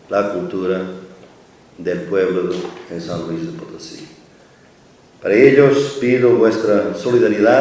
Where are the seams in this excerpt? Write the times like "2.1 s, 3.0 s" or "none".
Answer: 3.4 s